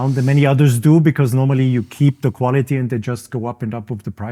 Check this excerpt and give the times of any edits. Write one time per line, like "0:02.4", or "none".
none